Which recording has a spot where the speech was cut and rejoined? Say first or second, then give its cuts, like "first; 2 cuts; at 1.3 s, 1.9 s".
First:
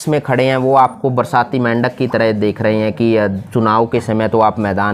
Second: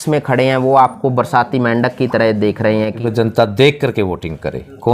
second; 1 cut; at 2.9 s